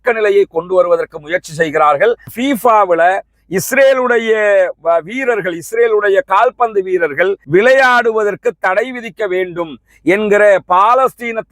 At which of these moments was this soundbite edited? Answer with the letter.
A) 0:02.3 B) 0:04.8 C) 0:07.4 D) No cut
A